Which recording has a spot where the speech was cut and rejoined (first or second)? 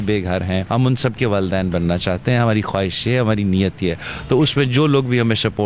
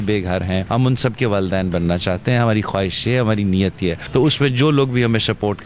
second